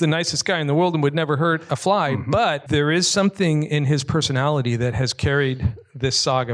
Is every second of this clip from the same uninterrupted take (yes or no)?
no